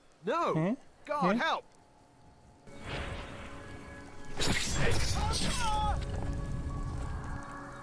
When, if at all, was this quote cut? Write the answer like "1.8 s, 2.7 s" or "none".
2.7 s

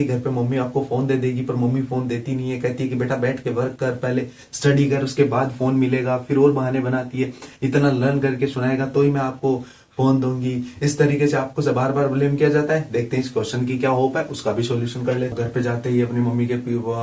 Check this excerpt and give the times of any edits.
15.3 s

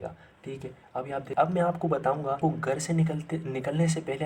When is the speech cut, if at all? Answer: 1.3 s, 2.4 s

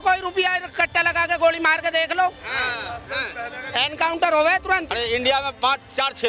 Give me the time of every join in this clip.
4.9 s

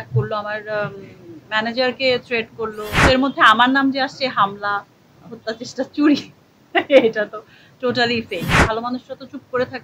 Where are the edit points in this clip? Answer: 2.9 s, 8.6 s

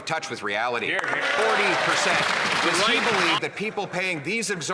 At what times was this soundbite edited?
3.0 s

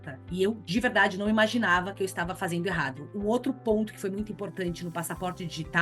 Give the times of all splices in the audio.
3.0 s

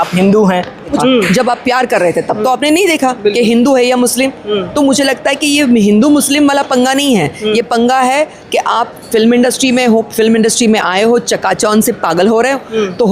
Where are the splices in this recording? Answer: 1.0 s

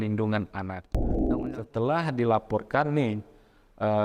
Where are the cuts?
1.1 s

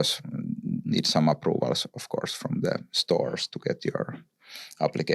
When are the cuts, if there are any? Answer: none

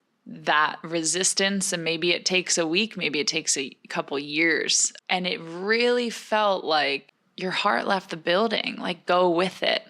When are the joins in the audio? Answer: 4.8 s

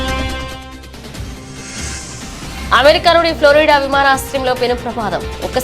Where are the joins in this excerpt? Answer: none

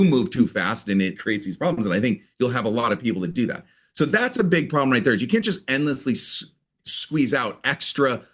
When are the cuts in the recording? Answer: 1.2 s

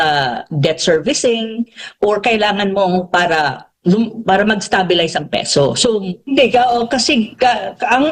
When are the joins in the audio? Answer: 6.1 s

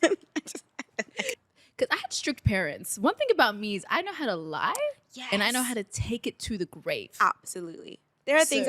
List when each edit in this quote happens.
1.4 s

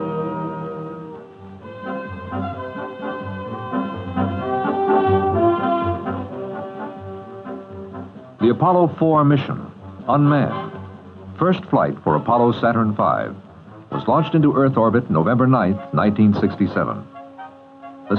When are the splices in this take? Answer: 5.9 s

